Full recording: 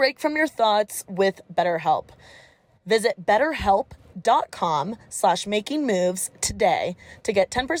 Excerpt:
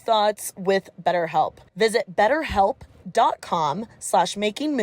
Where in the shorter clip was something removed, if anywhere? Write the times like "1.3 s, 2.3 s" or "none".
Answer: 1.6 s